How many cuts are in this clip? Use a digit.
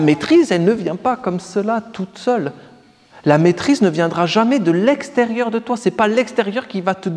0